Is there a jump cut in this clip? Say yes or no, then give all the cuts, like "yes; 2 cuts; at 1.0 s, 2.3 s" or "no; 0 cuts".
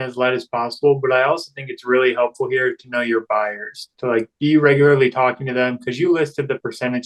no; 0 cuts